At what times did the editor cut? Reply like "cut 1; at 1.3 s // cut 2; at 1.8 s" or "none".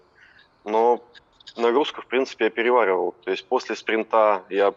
none

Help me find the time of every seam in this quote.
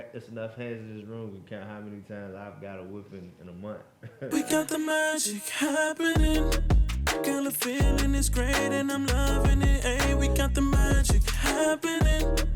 cut 1; at 4.3 s

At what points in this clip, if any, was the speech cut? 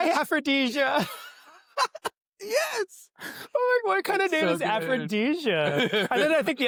none

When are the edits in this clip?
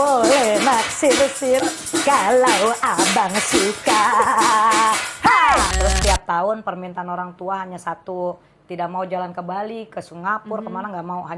cut 1; at 5.7 s

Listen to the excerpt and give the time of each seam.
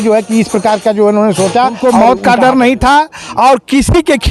cut 1; at 1.8 s

